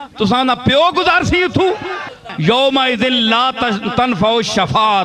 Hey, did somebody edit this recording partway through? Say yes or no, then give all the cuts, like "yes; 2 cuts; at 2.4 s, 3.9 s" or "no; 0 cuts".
yes; 1 cut; at 2.2 s